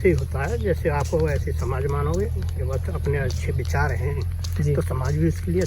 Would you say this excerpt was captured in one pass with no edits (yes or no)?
yes